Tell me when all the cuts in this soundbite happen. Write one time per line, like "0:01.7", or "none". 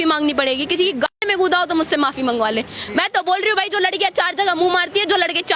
none

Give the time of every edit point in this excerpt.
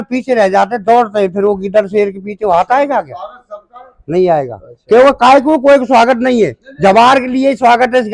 none

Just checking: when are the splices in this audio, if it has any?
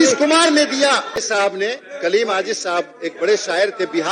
0:01.1

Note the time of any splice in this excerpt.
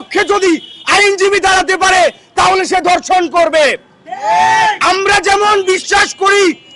none

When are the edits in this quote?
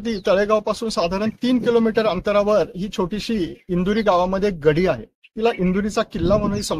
none

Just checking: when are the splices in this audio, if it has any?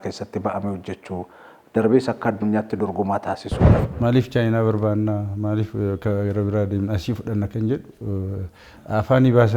0:03.8

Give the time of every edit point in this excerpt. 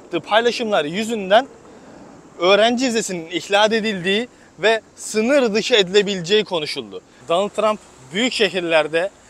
0:07.2

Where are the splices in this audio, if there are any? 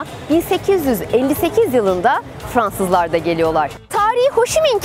0:03.8

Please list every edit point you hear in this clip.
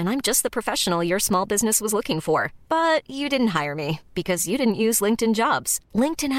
none

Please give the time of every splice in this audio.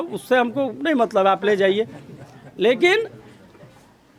none

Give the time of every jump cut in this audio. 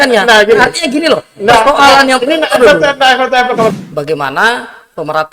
0:03.7

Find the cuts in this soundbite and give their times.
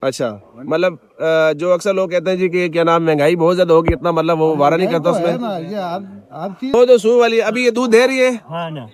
0:06.7

